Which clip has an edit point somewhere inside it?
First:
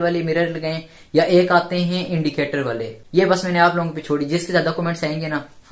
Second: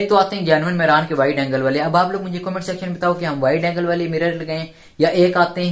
first; 1 cut; at 3.0 s

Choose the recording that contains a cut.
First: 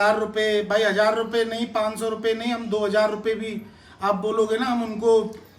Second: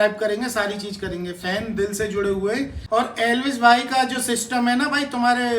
second; 1 cut; at 2.8 s

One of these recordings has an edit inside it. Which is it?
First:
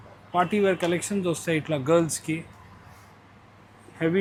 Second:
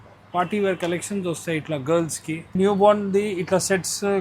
second; 1 cut; at 2.5 s

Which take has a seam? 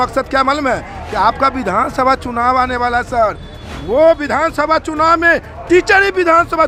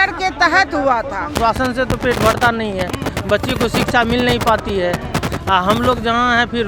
second; 1 cut; at 1.4 s

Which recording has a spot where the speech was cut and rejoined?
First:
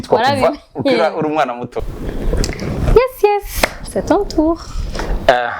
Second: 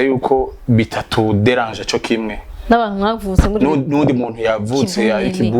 first; 1 cut; at 1.7 s

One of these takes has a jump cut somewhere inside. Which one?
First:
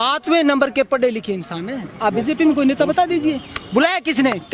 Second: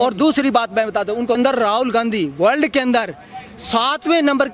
second; 1 cut; at 1.4 s

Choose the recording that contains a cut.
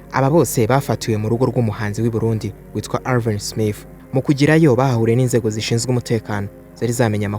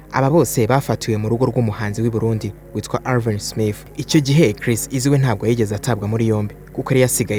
first; 1 cut; at 3.9 s

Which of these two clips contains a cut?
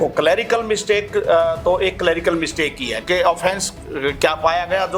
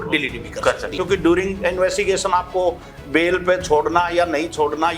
second; 1 cut; at 0.9 s

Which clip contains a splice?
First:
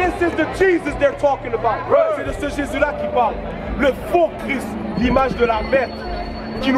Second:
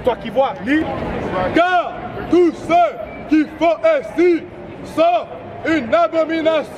second; 1 cut; at 0.9 s

